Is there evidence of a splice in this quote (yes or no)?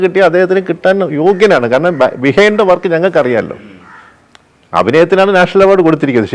no